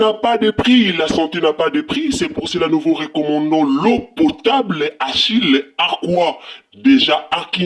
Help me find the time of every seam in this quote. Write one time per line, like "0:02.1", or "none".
none